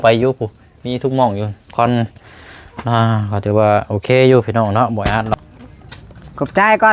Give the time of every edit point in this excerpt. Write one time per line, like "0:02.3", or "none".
0:05.3

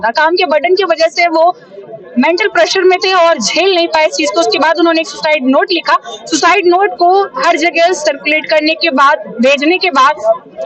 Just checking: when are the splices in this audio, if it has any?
none

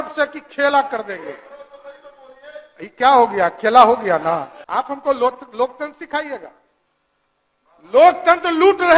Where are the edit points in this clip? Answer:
0:04.6

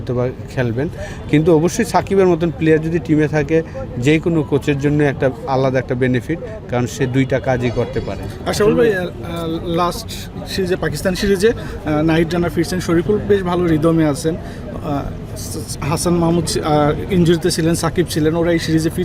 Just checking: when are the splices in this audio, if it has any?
none

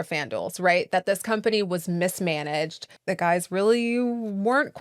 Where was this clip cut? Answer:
0:02.9

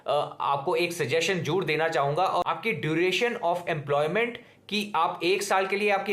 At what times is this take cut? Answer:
0:02.4

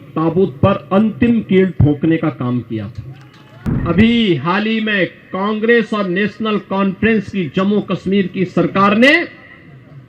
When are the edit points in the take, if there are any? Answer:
0:03.7

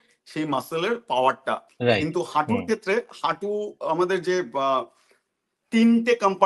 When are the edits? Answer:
0:01.7

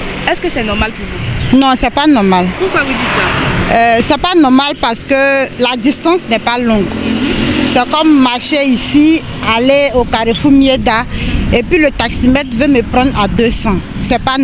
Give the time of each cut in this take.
none

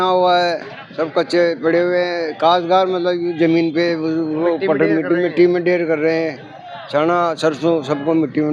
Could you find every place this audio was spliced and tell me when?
none

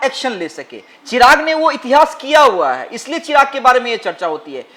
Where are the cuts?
none

